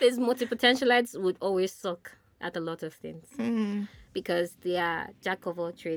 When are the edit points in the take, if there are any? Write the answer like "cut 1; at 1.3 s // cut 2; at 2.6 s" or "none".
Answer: none